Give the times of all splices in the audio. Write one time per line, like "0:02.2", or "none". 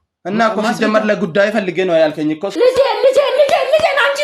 0:02.5